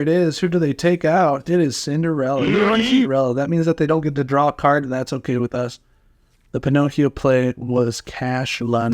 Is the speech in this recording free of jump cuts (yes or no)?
yes